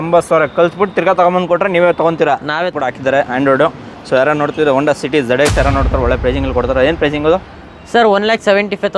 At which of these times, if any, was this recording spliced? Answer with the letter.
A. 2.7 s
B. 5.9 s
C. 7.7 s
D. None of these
A